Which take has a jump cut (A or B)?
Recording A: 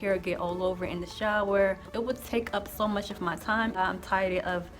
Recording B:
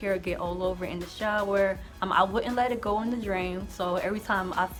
A